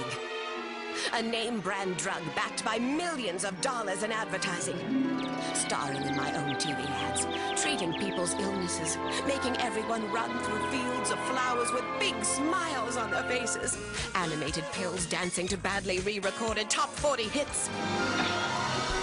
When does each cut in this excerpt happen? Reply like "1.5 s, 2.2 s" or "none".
12.0 s